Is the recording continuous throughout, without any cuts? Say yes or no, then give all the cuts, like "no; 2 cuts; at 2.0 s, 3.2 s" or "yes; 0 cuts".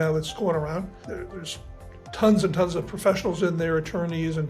no; 1 cut; at 1.0 s